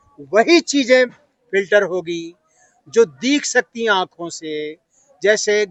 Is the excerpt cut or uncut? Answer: uncut